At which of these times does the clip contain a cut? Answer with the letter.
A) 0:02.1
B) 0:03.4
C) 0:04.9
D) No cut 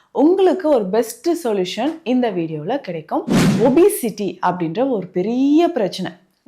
B